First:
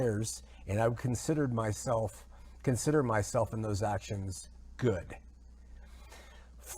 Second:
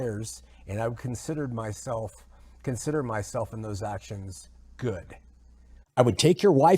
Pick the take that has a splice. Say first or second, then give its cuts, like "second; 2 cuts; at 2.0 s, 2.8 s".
second; 1 cut; at 5.8 s